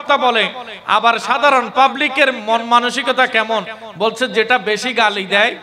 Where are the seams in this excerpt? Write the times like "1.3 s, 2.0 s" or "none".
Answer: none